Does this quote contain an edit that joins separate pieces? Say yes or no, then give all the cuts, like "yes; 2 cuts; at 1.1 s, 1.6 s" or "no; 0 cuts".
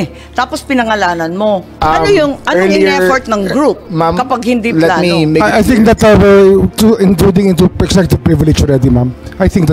yes; 1 cut; at 1.7 s